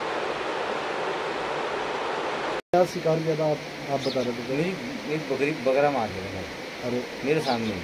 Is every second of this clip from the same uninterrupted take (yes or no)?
no